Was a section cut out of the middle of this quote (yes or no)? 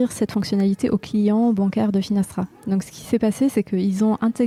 no